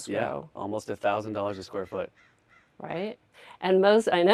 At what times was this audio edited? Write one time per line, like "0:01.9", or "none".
none